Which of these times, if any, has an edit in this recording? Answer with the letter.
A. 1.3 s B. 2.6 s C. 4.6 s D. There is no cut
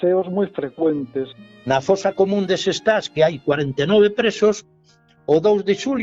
A